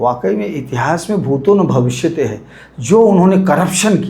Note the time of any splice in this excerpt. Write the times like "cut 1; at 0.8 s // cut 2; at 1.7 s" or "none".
none